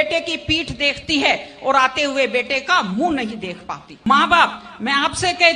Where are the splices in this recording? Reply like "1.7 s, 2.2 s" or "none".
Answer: 3.9 s